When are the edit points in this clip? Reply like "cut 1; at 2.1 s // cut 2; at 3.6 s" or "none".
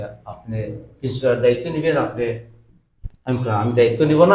none